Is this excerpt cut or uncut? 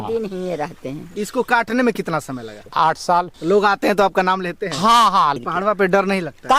cut